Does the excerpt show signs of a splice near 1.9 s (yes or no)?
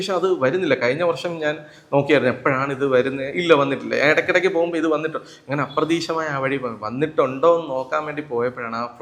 no